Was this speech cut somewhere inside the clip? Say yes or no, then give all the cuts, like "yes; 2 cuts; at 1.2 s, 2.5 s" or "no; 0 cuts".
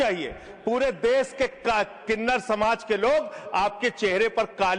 no; 0 cuts